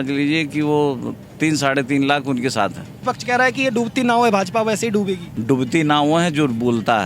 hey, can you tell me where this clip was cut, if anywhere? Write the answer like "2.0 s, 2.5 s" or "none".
3.0 s, 5.3 s